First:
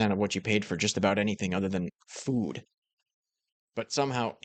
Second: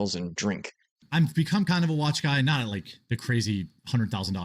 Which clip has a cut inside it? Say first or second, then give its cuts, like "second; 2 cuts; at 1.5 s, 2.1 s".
second; 1 cut; at 1.0 s